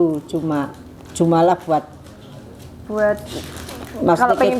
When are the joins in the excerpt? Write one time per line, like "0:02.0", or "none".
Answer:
none